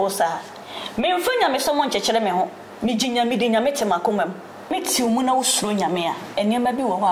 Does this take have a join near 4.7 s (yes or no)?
yes